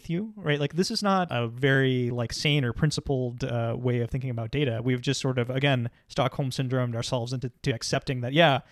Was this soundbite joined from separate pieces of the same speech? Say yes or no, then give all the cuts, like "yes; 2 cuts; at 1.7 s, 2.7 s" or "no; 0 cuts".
yes; 1 cut; at 1.3 s